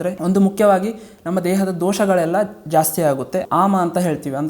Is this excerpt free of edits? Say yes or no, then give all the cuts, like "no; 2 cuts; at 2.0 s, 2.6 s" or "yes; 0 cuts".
no; 1 cut; at 3.4 s